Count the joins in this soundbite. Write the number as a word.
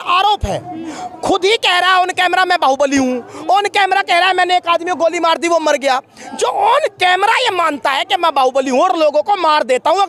zero